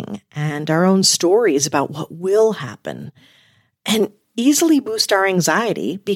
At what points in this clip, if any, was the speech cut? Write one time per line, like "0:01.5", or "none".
none